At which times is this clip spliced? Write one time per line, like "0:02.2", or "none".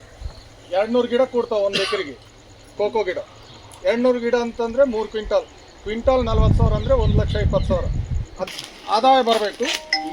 0:08.3

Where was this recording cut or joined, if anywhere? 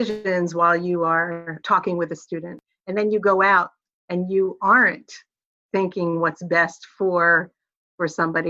0:01.5
0:02.6

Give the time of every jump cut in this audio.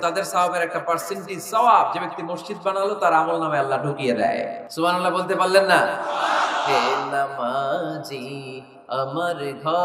0:04.6

